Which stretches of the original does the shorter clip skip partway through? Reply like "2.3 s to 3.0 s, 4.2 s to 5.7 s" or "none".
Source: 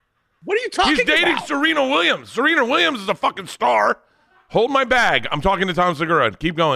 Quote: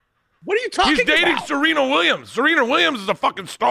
none